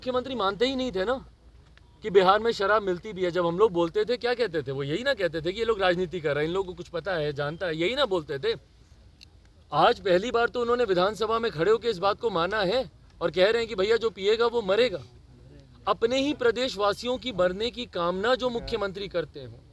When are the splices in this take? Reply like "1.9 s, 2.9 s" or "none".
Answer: none